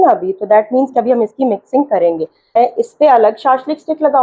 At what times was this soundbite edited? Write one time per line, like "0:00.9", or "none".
0:02.6